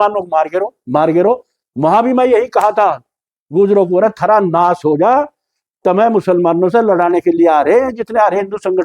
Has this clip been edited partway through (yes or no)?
no